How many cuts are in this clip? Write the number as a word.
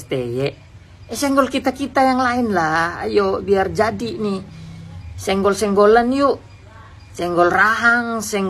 zero